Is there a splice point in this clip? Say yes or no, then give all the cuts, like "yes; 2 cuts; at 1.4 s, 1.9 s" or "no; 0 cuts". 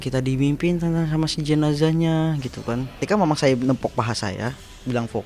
yes; 1 cut; at 2.9 s